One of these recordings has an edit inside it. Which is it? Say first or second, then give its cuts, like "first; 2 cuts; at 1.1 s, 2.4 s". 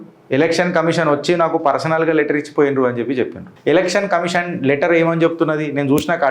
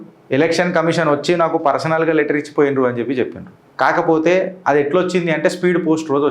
first; 1 cut; at 3.4 s